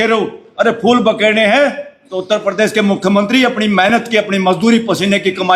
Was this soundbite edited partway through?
no; 0 cuts

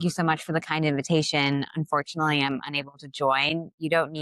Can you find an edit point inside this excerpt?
no; 0 cuts

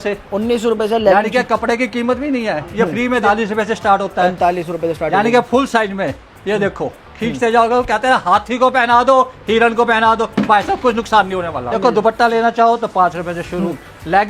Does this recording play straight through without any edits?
no; 2 cuts; at 3.2 s, 11.7 s

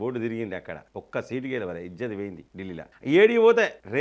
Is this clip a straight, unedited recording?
yes; 0 cuts

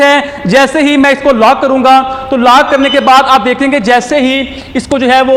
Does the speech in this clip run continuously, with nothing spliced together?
yes; 0 cuts

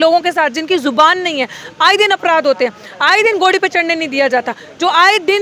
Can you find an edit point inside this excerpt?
no; 0 cuts

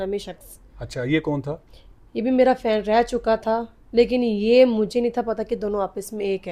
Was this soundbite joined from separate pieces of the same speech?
no; 0 cuts

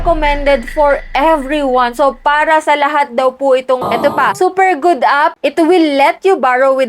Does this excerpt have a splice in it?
yes; 1 cut; at 3.8 s

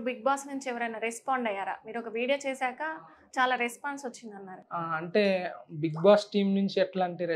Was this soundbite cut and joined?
no; 0 cuts

